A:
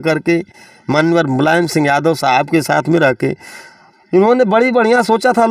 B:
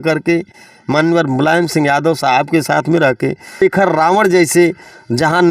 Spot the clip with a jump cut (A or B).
B